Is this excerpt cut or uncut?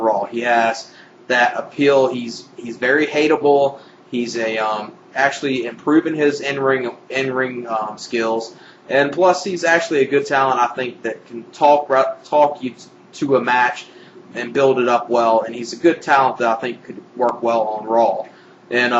uncut